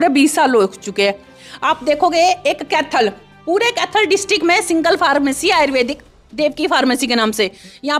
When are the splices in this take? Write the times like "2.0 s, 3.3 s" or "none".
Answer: none